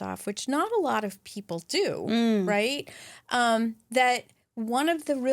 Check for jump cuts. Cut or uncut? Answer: uncut